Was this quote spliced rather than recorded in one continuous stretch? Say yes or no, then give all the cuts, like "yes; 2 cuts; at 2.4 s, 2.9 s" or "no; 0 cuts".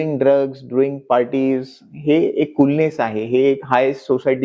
no; 0 cuts